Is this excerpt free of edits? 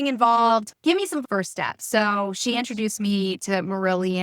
no; 1 cut; at 1.2 s

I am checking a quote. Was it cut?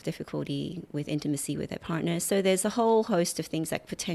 no; 0 cuts

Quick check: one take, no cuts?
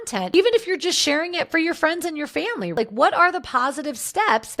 yes; 0 cuts

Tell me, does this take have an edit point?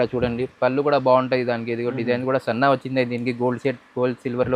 no; 0 cuts

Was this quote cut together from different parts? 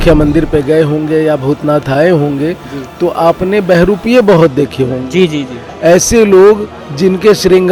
no; 0 cuts

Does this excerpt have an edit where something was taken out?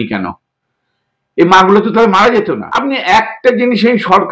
yes; 1 cut; at 2.7 s

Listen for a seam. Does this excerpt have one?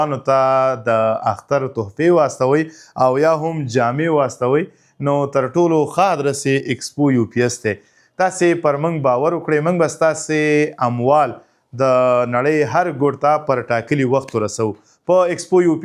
no; 0 cuts

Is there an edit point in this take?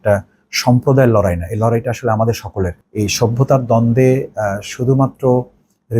yes; 1 cut; at 2.8 s

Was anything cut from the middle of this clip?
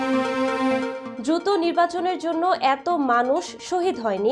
yes; 1 cut; at 1.0 s

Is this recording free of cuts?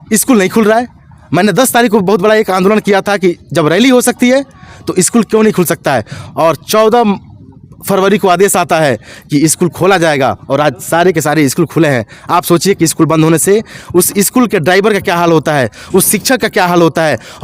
yes; 0 cuts

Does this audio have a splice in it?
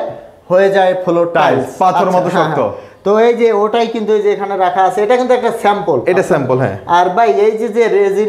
no; 0 cuts

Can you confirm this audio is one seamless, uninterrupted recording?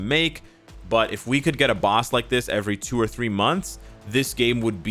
yes; 0 cuts

